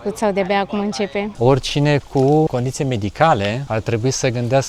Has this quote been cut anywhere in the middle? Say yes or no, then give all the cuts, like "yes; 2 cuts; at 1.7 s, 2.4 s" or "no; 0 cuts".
yes; 3 cuts; at 1.3 s, 2.5 s, 3.6 s